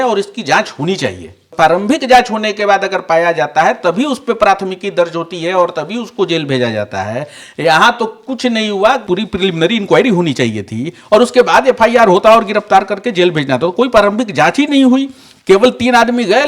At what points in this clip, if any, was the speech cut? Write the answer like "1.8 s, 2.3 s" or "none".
1.4 s, 9.0 s